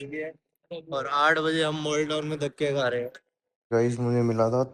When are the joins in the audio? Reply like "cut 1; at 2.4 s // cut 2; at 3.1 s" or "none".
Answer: cut 1; at 3.6 s